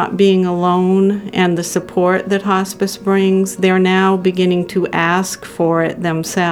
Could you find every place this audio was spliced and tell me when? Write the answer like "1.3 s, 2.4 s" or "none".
none